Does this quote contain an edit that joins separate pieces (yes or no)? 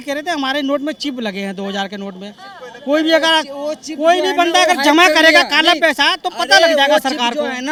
no